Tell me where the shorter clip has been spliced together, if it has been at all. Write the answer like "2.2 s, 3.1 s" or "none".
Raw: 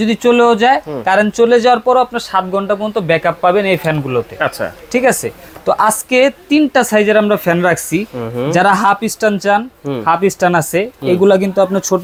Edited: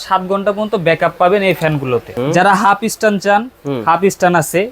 2.1 s